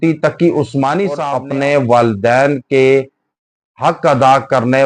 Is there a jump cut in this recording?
yes; 1 cut; at 1.3 s

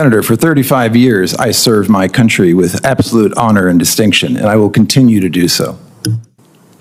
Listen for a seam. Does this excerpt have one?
no; 0 cuts

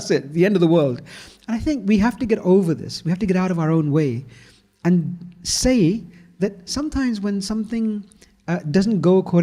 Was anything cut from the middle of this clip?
no; 0 cuts

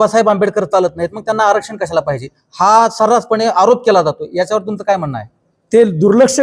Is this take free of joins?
yes; 0 cuts

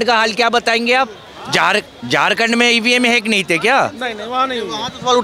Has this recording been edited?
no; 0 cuts

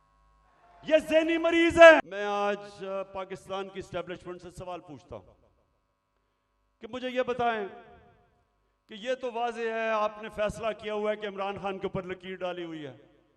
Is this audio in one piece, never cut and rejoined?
no; 1 cut; at 2.0 s

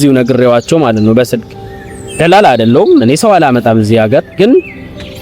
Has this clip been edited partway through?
no; 0 cuts

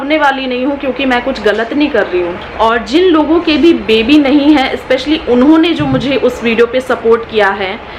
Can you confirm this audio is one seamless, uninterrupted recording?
no; 1 cut; at 2.4 s

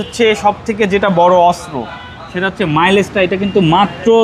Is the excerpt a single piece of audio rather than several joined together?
yes; 0 cuts

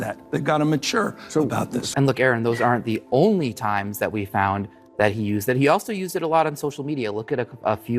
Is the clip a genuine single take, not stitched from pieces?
no; 1 cut; at 1.9 s

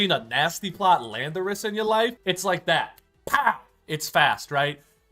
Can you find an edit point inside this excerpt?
yes; 1 cut; at 2.2 s

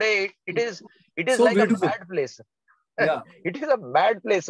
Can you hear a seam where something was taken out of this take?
no; 0 cuts

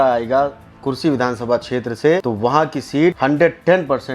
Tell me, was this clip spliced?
yes; 2 cuts; at 2.2 s, 3.2 s

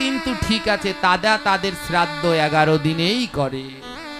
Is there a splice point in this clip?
no; 0 cuts

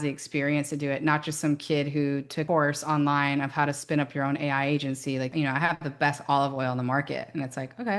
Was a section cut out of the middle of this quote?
yes; 2 cuts; at 2.4 s, 5.3 s

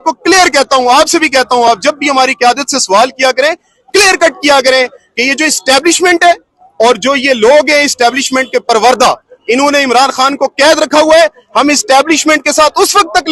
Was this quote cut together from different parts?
no; 0 cuts

